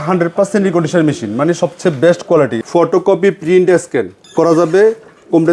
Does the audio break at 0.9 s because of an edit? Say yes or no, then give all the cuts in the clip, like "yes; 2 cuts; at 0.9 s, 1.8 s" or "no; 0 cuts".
no; 2 cuts; at 2.6 s, 4.2 s